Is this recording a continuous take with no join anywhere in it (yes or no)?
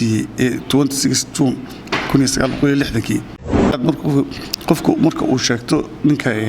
no